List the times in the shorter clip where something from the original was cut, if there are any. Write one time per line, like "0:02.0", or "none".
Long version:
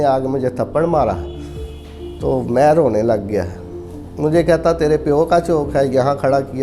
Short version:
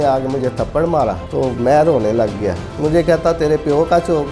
0:01.2
0:02.6